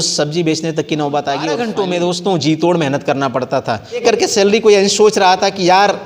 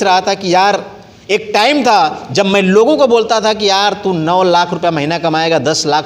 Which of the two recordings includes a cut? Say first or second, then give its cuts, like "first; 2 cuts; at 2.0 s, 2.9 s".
first; 2 cuts; at 1.6 s, 4.0 s